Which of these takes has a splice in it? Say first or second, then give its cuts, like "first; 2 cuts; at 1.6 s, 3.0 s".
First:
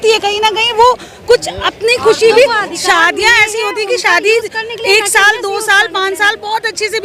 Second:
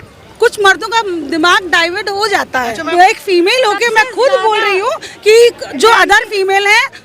second; 1 cut; at 2.9 s